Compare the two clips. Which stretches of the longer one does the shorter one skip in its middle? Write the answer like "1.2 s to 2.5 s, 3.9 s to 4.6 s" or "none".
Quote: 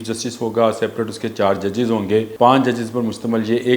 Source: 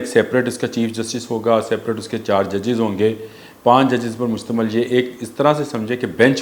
3.2 s to 3.6 s